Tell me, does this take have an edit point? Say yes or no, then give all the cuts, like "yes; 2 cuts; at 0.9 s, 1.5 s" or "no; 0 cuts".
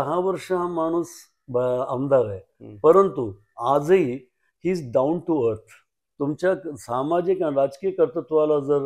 yes; 1 cut; at 6.0 s